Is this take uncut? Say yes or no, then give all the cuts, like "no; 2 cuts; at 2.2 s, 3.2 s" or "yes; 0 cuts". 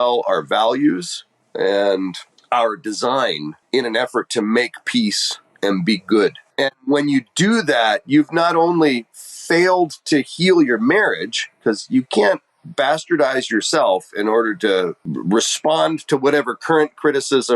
no; 4 cuts; at 2.3 s, 3.5 s, 6.4 s, 15.1 s